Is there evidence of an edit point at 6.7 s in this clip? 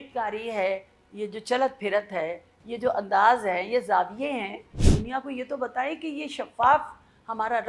no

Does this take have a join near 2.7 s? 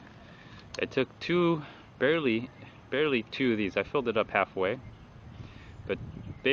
yes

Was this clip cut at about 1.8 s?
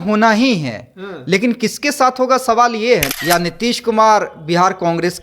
no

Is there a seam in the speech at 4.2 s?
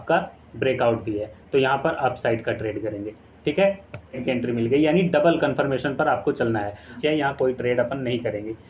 yes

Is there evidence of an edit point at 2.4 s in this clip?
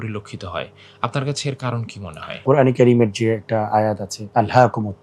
yes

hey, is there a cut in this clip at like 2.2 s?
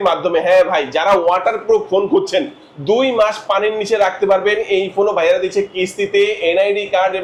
no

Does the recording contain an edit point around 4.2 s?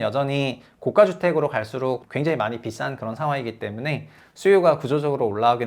no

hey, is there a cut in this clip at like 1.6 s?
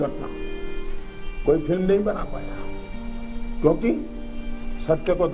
no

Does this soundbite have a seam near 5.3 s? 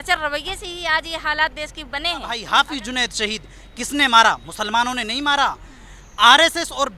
no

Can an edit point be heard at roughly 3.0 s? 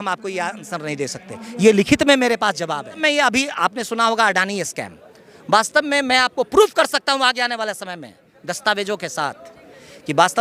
yes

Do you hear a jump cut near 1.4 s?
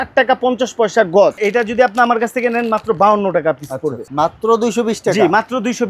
yes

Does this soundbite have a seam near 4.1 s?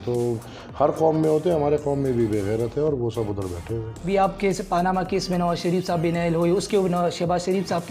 yes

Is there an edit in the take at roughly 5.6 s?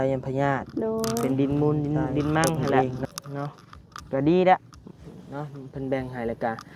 no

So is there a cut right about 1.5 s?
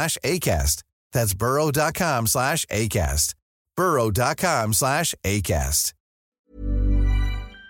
no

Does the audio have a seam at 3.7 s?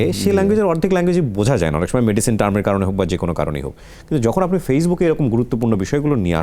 no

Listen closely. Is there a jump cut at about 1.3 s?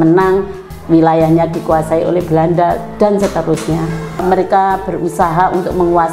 no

